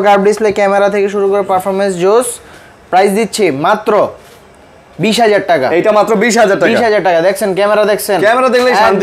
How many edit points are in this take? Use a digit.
0